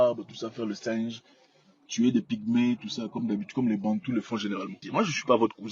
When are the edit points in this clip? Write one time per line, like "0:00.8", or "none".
0:04.7